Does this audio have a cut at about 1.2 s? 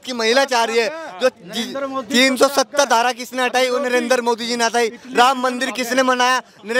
no; 0 cuts

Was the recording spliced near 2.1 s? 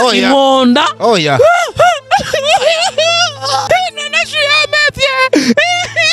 no; 1 cut; at 3.7 s

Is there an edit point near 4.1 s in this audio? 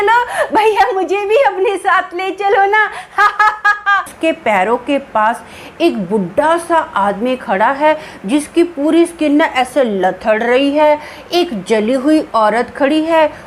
yes; 1 cut; at 4.1 s

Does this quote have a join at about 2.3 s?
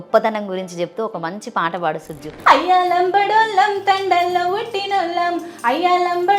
yes; 1 cut; at 2.3 s

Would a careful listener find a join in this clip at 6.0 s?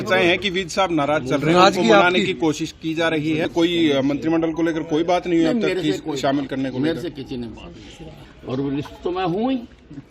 no; 2 cuts; at 3.5 s, 8.3 s

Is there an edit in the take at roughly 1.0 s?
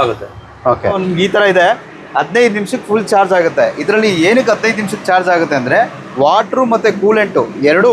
yes; 1 cut; at 1.0 s

